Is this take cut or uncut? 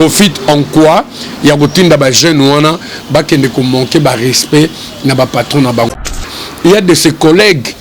cut